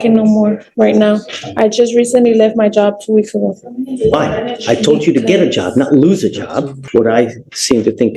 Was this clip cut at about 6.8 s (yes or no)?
yes